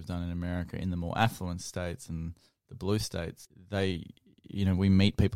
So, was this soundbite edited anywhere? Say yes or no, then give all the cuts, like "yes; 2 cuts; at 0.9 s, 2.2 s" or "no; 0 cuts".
yes; 1 cut; at 3.5 s